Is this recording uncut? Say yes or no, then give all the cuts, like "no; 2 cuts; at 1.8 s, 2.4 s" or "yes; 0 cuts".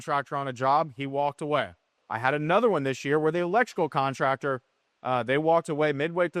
no; 1 cut; at 1.9 s